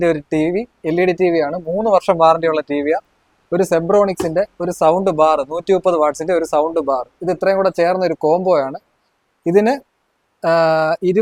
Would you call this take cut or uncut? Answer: uncut